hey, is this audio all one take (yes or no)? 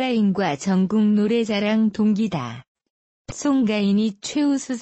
yes